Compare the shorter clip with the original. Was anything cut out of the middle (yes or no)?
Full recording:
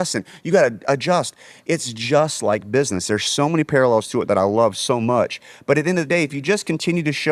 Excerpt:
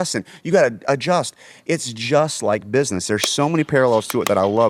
no